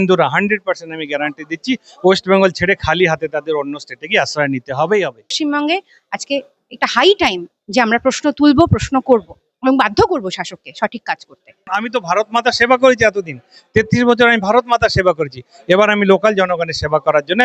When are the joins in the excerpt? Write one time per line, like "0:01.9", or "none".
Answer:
0:05.3
0:11.7